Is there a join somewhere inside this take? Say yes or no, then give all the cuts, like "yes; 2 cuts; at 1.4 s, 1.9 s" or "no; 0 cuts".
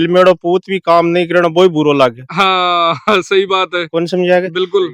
no; 0 cuts